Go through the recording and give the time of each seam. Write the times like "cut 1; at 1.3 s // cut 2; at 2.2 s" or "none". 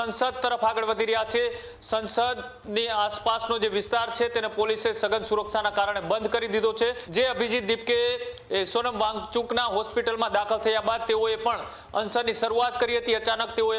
cut 1; at 7.0 s